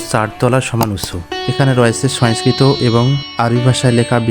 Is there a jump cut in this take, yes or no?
yes